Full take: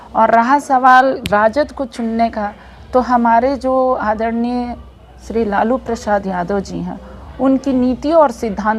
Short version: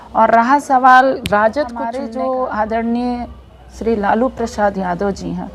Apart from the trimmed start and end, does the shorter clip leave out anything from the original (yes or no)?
yes